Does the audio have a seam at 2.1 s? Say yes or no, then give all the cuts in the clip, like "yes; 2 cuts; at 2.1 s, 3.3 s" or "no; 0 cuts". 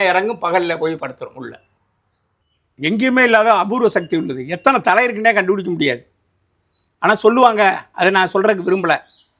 yes; 1 cut; at 2.1 s